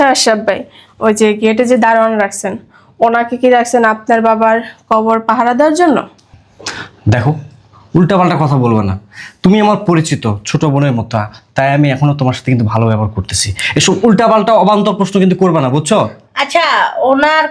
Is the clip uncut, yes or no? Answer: yes